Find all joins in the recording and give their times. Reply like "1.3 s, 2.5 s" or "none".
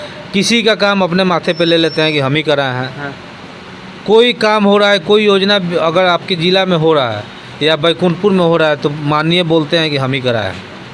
none